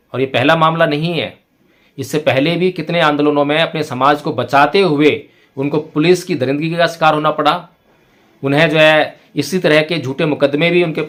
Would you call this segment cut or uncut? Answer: uncut